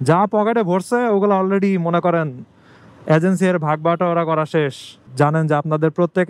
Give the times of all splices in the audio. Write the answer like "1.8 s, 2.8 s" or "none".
5.0 s